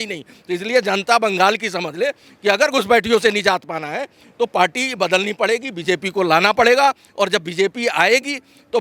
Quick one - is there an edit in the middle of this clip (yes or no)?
no